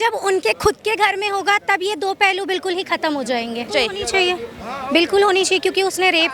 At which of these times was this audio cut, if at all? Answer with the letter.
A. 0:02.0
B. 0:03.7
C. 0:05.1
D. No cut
B